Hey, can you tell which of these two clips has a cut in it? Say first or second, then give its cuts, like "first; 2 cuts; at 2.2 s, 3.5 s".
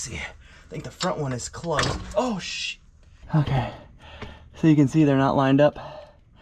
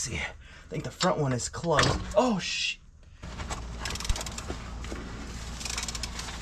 second; 1 cut; at 3.3 s